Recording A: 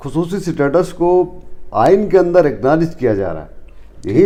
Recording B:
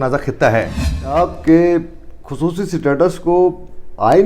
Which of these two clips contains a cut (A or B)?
B